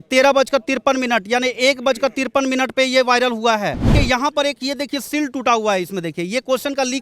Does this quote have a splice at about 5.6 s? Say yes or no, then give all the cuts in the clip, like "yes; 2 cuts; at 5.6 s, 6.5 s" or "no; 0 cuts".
no; 1 cut; at 3.9 s